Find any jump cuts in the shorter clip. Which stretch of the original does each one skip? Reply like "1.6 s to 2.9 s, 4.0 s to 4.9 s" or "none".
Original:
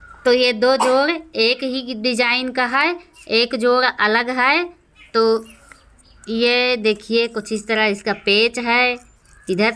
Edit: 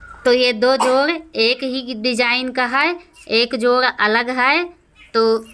none